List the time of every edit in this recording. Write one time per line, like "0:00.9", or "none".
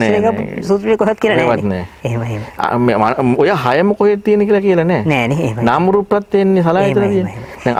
none